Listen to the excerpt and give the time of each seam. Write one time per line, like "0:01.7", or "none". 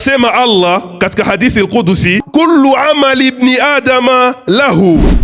0:02.2